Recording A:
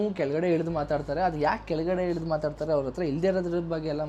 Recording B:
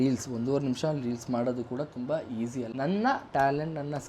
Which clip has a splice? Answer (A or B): B